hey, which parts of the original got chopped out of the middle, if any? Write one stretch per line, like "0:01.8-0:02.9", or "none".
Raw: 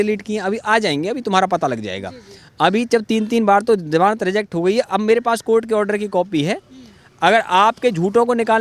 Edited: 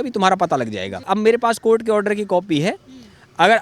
0:02.2-0:04.9